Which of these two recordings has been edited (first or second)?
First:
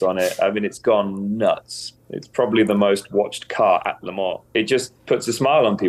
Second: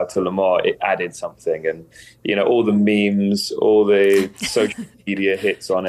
first